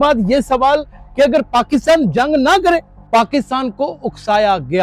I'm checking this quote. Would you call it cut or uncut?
cut